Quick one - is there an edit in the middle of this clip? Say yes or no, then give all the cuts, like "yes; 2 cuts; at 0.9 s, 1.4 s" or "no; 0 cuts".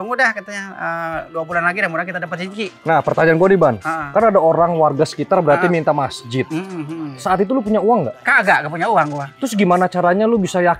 no; 0 cuts